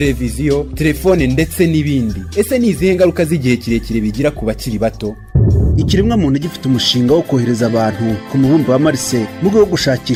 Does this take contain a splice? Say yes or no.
no